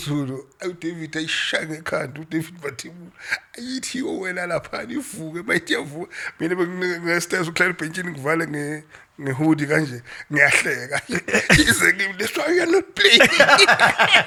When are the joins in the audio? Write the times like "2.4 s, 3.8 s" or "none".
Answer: none